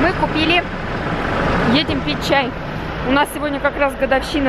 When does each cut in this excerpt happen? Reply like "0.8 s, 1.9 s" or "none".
none

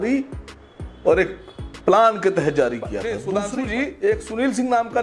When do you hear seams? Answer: 3.1 s

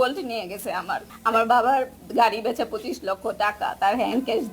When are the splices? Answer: 1.1 s

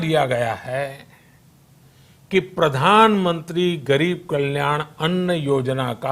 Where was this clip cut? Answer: none

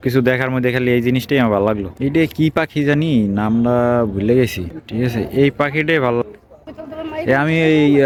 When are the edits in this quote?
none

